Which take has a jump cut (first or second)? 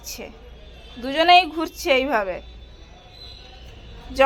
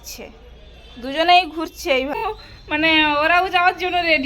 second